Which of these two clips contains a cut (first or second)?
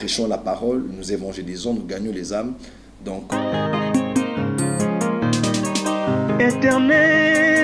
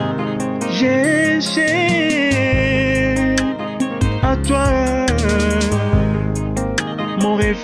first